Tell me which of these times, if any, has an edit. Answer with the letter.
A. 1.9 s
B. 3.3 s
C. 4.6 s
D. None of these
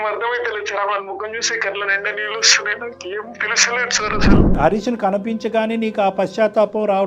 C